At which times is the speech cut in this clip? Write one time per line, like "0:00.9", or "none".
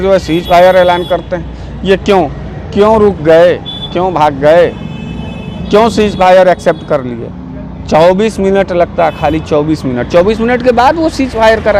none